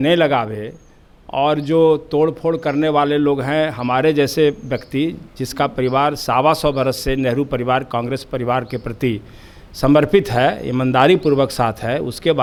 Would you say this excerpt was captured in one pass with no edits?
yes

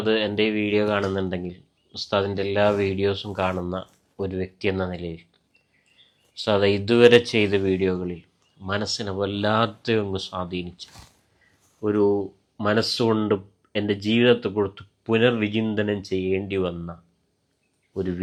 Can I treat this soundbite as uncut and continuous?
yes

